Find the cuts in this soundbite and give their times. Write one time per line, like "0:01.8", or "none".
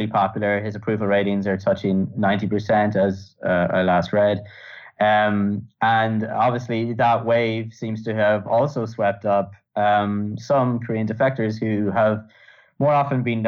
none